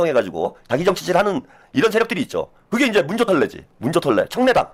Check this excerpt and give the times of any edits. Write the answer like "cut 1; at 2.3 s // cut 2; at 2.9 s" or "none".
none